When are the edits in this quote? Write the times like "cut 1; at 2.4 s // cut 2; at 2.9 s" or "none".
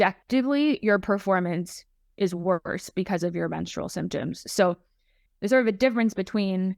none